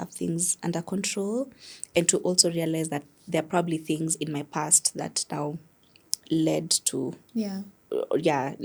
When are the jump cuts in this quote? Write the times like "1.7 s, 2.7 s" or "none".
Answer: none